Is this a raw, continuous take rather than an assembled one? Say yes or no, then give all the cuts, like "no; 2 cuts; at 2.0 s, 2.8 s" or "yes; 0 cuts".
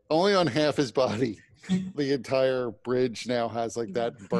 no; 1 cut; at 1.9 s